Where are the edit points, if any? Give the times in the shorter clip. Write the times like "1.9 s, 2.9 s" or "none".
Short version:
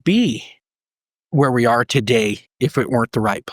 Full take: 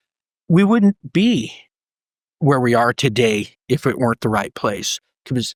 none